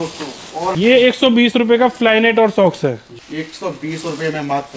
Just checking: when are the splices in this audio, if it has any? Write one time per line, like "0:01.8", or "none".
0:00.7
0:03.2